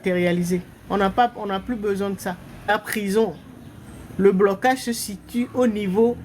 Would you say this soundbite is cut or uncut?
cut